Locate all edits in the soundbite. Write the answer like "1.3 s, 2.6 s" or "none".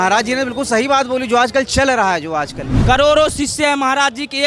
2.7 s